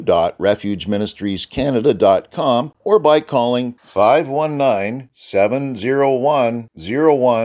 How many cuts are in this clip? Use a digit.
1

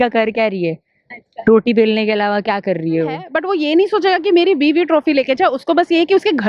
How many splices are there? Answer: 1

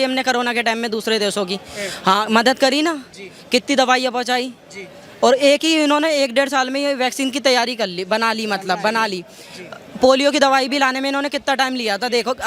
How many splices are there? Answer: 0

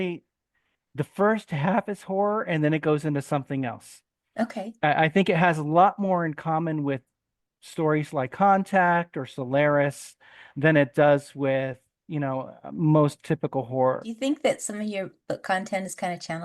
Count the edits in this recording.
1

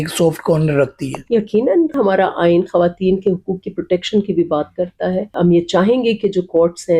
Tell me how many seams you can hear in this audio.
2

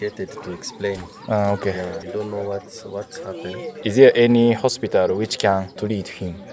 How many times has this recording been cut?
2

